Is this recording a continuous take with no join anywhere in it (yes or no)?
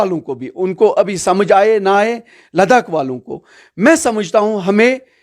yes